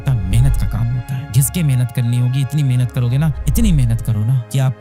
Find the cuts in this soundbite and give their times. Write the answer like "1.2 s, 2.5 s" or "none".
1.3 s